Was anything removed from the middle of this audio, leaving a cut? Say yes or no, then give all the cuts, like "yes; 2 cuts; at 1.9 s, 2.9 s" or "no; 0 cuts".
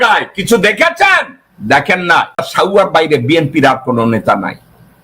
yes; 1 cut; at 2.5 s